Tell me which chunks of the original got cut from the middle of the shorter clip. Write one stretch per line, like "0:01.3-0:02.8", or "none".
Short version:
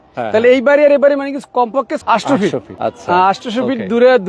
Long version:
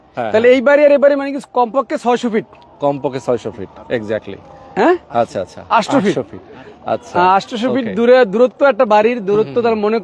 0:01.9-0:05.6
0:06.3-0:06.8